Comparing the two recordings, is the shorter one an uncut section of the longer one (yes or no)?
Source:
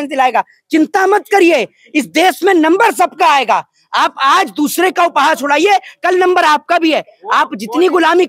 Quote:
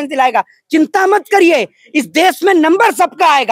yes